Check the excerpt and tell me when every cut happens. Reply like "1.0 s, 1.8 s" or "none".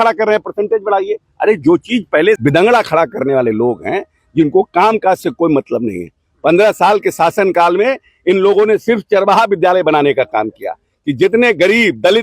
2.4 s

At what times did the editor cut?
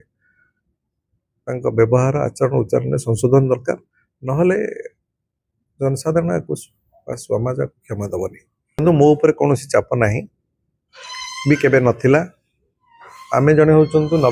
8.8 s

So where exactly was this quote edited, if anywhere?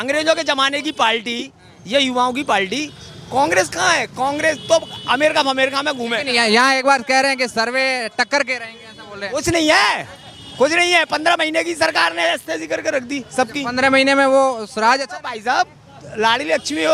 none

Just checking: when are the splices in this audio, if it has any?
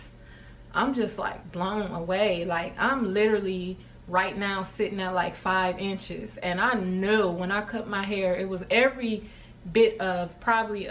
none

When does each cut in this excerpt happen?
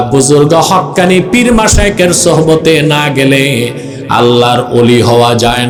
none

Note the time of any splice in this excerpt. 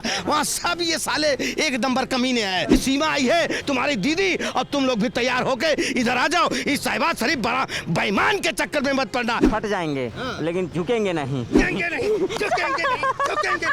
2.7 s, 9.4 s, 11.6 s

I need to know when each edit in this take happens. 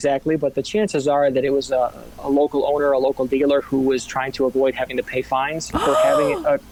none

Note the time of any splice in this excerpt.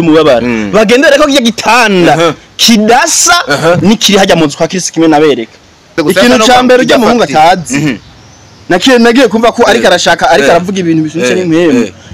5.9 s

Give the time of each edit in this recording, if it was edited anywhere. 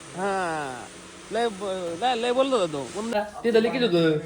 3.1 s

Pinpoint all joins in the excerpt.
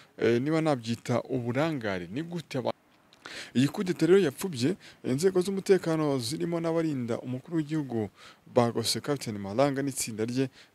2.7 s

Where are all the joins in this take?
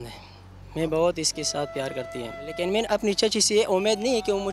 2.5 s

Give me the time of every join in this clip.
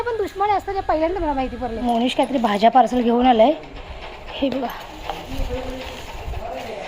1.8 s

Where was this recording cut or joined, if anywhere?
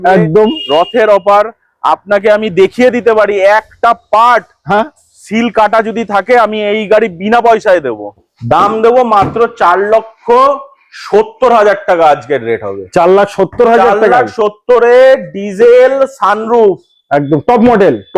8.2 s

